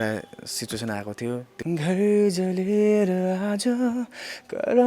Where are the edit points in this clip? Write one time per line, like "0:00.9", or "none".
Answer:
0:01.5